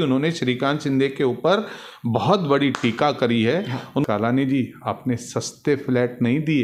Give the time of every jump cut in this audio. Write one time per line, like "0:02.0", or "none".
0:04.0